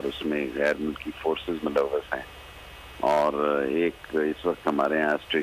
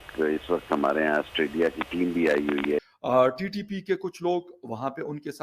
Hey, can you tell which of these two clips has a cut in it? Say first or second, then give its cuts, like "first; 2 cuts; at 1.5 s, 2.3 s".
second; 1 cut; at 2.8 s